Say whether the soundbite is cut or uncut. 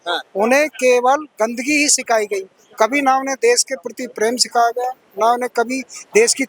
uncut